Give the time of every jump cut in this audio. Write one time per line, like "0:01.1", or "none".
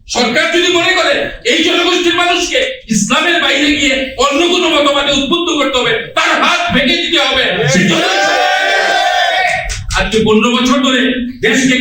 none